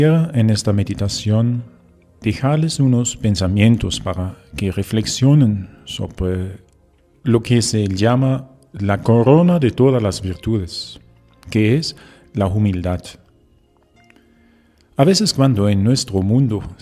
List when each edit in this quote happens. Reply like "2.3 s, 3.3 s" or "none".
none